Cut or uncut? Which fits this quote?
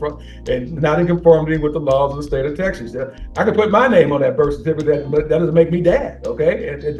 uncut